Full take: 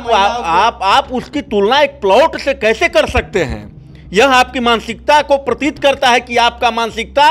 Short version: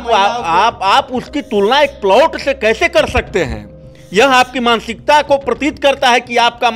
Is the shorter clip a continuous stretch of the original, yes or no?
yes